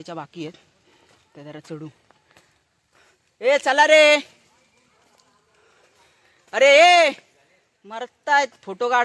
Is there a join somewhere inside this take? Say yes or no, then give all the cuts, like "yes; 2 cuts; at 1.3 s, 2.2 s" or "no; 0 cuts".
no; 0 cuts